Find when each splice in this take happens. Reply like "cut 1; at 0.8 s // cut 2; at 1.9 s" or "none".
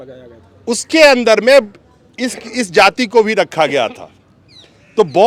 none